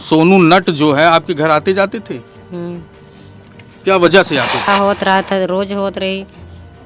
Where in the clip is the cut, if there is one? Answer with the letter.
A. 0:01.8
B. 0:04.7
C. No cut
B